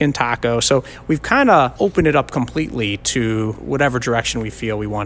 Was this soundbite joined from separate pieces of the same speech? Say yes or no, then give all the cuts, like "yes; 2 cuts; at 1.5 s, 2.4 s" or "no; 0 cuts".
yes; 1 cut; at 3.6 s